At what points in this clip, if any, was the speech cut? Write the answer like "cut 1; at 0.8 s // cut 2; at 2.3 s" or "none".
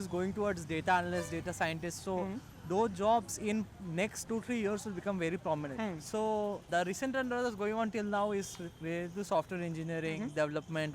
cut 1; at 4.3 s // cut 2; at 5.7 s // cut 3; at 6.7 s

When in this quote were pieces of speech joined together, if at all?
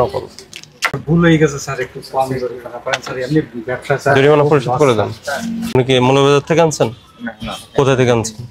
cut 1; at 5.7 s

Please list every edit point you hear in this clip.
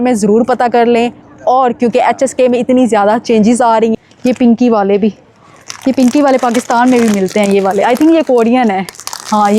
cut 1; at 3.9 s

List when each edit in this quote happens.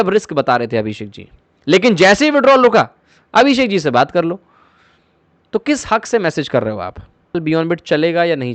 cut 1; at 7.3 s

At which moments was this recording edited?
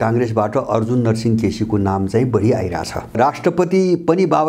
cut 1; at 3.1 s

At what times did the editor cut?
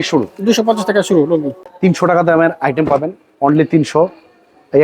cut 1; at 1.6 s

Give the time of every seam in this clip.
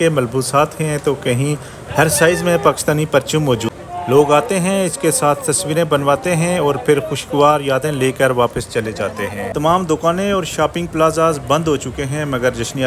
cut 1; at 3.7 s // cut 2; at 9.5 s

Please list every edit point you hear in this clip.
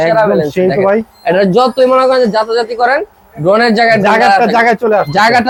none

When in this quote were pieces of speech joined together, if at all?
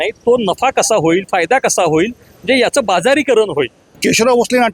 cut 1; at 3.8 s

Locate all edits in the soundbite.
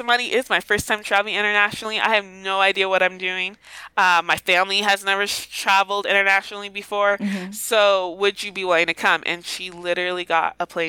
none

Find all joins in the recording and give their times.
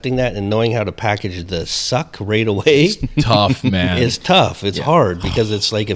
none

